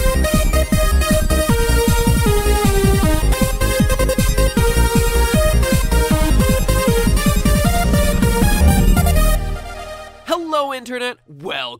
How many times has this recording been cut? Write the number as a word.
one